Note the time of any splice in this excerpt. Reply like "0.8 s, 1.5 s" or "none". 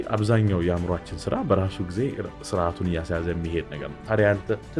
none

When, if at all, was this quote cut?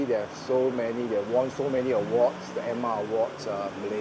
none

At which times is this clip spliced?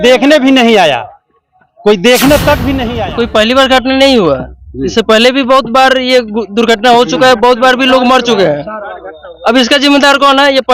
2.9 s

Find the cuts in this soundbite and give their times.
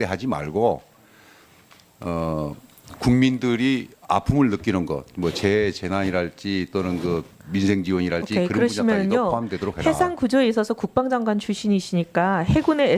1.0 s

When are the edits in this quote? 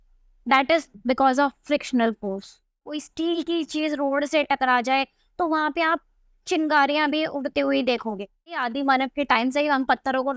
3.0 s, 8.7 s

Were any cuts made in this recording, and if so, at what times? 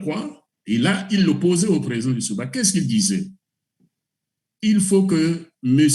none

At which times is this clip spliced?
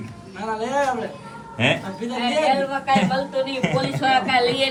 none

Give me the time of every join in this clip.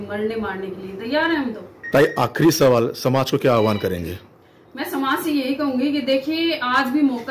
none

